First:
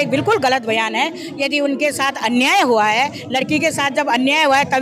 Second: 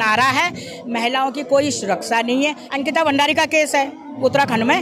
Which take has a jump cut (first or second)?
second